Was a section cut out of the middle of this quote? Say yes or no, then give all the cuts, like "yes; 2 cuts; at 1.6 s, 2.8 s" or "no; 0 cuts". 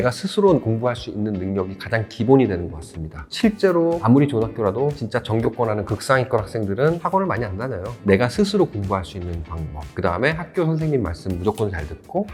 no; 0 cuts